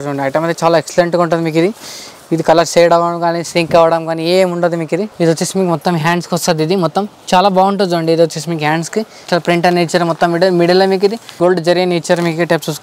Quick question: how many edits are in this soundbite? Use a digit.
3